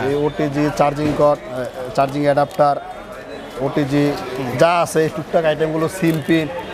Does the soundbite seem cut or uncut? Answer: uncut